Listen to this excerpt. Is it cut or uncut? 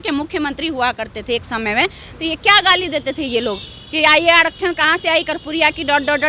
uncut